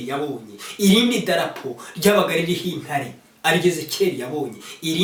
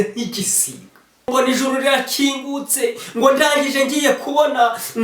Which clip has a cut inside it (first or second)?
second